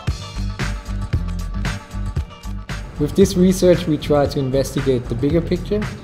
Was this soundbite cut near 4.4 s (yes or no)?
no